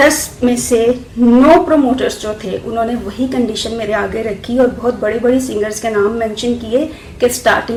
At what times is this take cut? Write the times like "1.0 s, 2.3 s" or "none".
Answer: none